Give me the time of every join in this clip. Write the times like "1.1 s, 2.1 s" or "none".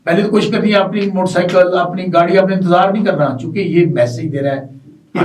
none